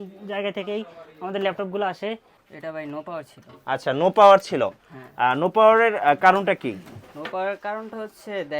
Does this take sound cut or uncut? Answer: cut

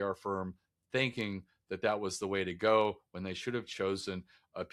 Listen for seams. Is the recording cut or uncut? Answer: uncut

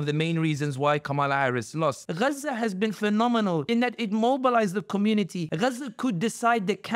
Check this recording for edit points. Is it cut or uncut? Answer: cut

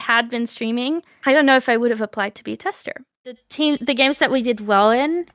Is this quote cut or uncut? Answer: cut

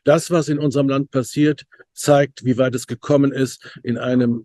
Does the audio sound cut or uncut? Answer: uncut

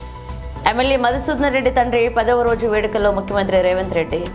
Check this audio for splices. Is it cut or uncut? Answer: uncut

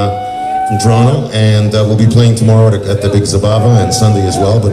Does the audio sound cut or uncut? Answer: uncut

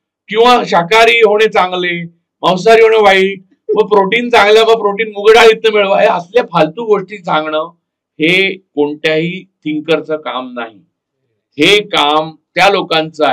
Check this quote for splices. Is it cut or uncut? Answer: uncut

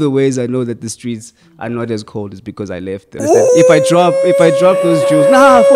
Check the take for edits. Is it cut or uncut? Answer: cut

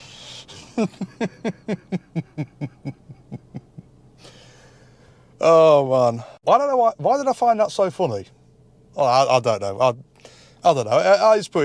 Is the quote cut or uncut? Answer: cut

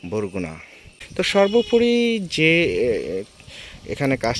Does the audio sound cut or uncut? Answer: cut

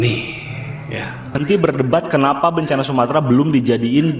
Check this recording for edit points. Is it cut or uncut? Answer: cut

